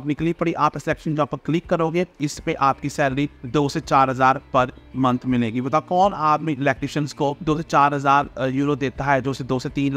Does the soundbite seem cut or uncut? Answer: cut